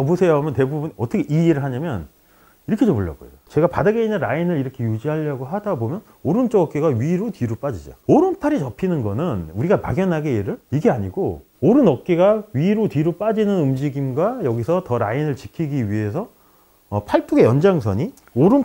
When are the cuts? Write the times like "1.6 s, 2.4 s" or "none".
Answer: 3.4 s, 8.0 s